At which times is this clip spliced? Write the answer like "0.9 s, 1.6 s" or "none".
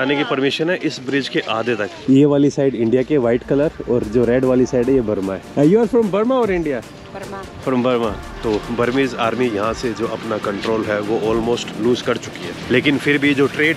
1.9 s, 5.4 s, 8.3 s